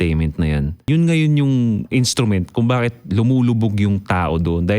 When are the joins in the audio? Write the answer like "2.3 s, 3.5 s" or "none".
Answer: 0.9 s, 1.9 s